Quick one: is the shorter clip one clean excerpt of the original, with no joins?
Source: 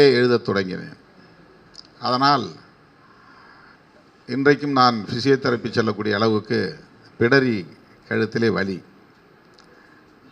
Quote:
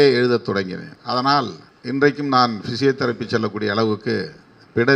no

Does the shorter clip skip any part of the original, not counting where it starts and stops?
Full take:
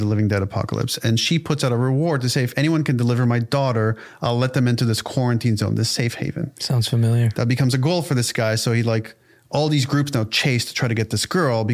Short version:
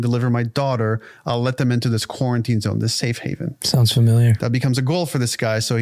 no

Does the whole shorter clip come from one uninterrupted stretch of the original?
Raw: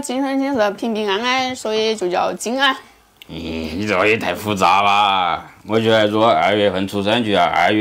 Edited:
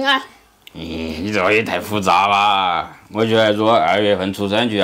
yes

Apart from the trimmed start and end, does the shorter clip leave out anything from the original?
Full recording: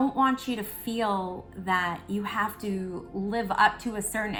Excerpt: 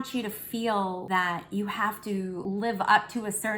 yes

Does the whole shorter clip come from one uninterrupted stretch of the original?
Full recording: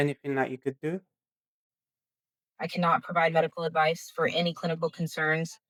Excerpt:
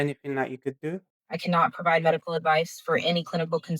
no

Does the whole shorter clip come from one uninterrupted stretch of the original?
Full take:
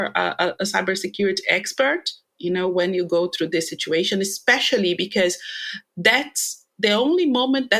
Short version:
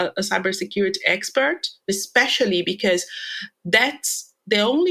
no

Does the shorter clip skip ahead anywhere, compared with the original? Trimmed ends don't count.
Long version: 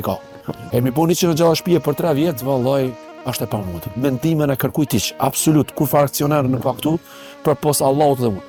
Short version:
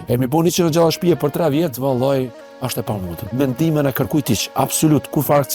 no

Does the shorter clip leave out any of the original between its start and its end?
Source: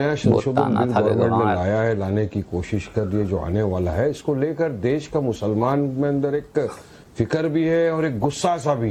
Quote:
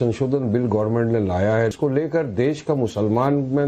yes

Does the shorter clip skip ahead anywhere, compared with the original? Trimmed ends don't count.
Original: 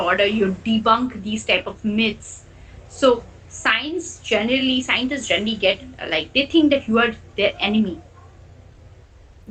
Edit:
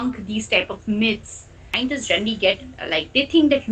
yes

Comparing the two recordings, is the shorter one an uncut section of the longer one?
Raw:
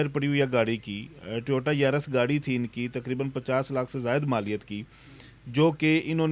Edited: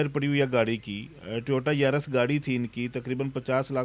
yes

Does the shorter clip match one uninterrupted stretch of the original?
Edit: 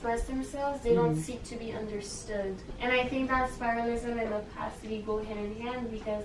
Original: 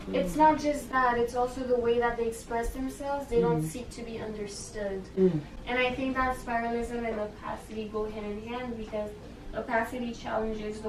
no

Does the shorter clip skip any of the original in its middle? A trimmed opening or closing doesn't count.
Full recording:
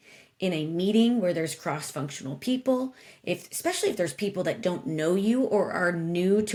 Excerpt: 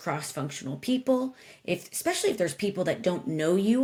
no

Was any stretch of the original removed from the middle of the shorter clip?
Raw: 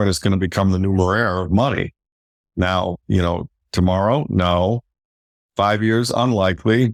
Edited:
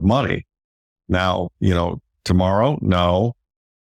no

